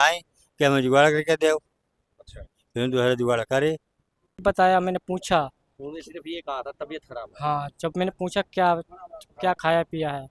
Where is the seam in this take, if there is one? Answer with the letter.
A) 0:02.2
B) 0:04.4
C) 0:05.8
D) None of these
B